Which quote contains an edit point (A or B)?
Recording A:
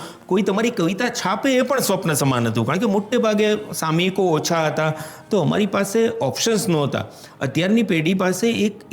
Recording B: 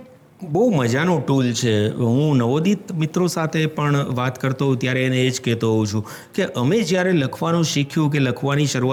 A